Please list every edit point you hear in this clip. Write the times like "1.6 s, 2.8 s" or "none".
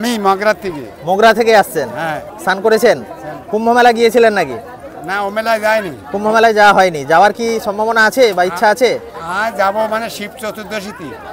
none